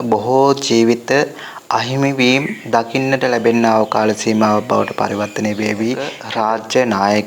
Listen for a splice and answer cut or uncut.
cut